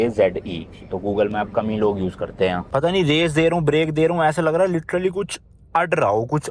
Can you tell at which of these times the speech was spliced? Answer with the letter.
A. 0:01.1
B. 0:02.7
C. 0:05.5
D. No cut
B